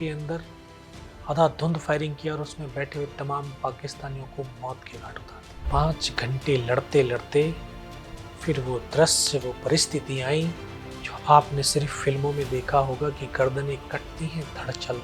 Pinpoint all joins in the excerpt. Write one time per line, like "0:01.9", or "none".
0:05.5